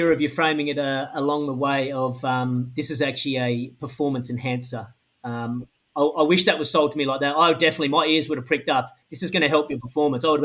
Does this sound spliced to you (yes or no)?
no